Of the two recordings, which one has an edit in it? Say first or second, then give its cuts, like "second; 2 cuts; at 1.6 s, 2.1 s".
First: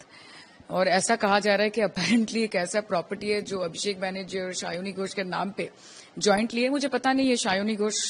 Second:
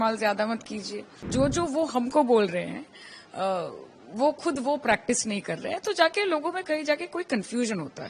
second; 1 cut; at 1.2 s